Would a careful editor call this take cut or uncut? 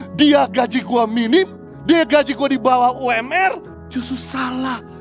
cut